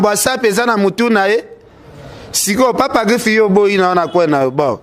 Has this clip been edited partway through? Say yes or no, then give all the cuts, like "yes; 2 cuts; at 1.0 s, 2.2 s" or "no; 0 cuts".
no; 0 cuts